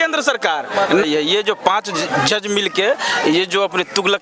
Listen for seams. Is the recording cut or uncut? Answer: cut